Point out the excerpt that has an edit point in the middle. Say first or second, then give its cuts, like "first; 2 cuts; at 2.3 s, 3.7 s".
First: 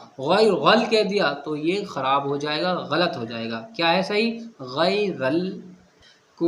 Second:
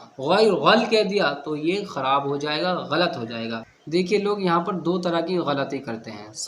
second; 1 cut; at 3.7 s